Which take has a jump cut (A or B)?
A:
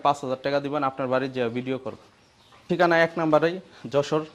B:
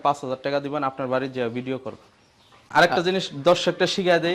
B